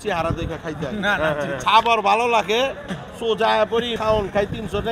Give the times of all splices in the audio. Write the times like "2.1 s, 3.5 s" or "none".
1.6 s, 4.0 s